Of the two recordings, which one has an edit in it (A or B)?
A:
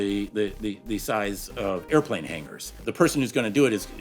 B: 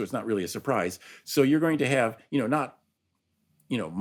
A